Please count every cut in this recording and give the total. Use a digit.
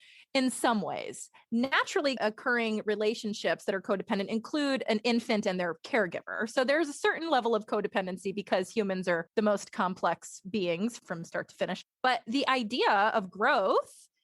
1